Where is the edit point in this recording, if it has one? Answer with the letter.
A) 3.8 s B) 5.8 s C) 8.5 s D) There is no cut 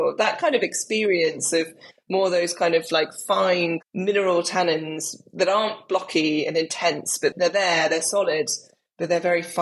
A